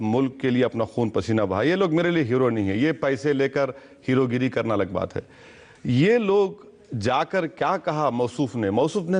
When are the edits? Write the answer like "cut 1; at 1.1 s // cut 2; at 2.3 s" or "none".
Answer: cut 1; at 2.8 s